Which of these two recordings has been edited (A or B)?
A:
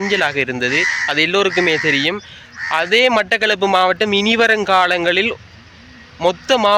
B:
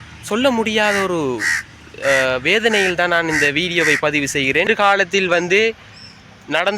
B